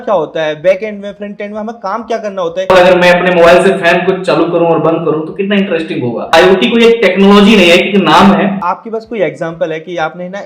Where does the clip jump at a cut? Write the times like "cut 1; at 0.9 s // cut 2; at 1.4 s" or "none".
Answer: cut 1; at 2.7 s // cut 2; at 6.3 s // cut 3; at 8.6 s